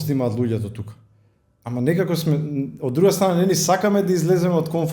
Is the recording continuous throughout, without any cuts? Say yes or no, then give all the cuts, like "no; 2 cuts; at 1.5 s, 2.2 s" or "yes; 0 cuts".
yes; 0 cuts